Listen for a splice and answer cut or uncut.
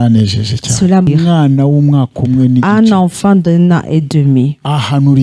cut